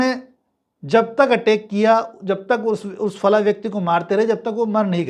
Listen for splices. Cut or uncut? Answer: uncut